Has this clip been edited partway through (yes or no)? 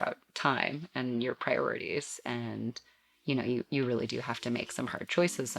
no